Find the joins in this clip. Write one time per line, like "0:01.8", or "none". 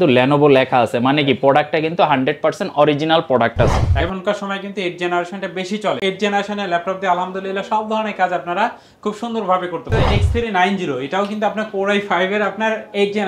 0:03.9
0:06.0
0:09.9